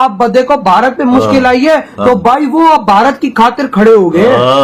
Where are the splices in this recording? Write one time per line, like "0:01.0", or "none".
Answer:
none

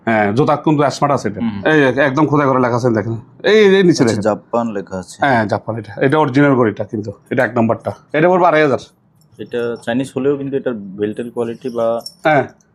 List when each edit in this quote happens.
0:01.5
0:08.0

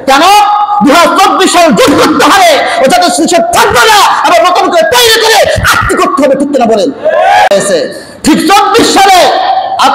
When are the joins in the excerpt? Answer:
0:07.5

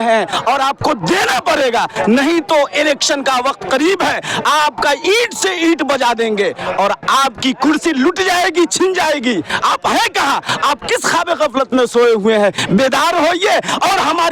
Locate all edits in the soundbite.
none

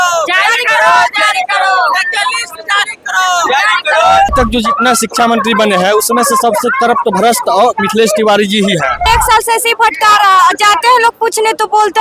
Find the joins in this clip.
0:04.3
0:09.0

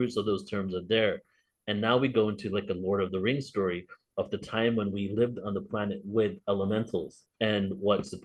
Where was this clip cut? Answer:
0:07.2

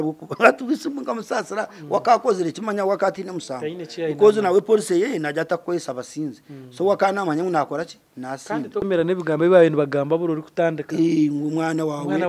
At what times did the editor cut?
0:08.9

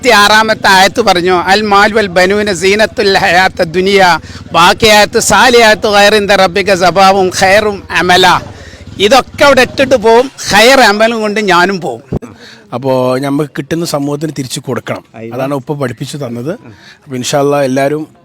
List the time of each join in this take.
0:12.2

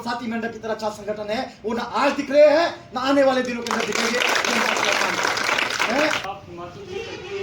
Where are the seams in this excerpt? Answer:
0:06.2

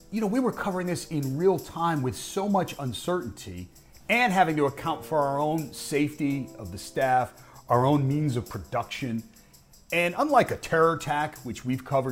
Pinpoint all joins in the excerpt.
none

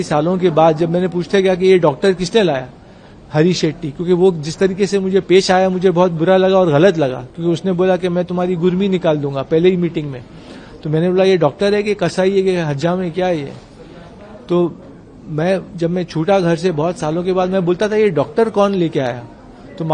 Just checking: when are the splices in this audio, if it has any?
none

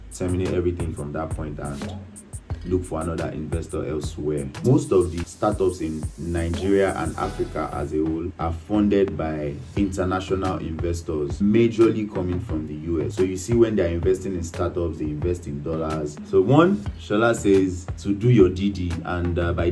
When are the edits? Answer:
0:04.6
0:16.1

